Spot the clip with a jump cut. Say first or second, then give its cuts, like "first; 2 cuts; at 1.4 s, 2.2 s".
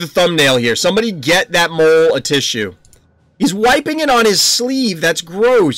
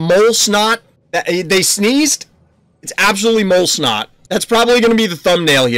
second; 2 cuts; at 0.9 s, 4.1 s